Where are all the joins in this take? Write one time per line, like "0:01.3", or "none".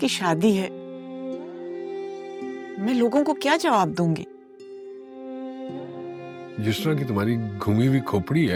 none